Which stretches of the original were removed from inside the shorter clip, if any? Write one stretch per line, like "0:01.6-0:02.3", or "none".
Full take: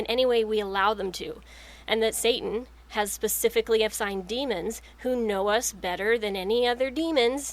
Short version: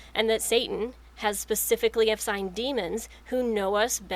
none